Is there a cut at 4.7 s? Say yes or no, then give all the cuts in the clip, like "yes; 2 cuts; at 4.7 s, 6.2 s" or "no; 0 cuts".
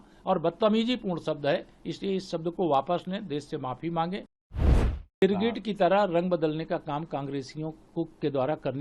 yes; 1 cut; at 4.7 s